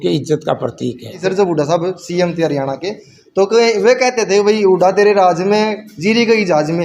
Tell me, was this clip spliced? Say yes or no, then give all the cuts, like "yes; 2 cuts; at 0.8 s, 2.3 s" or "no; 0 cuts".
yes; 1 cut; at 1.1 s